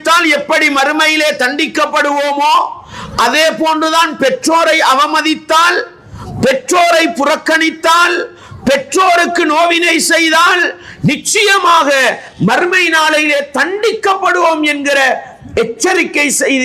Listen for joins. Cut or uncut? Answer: uncut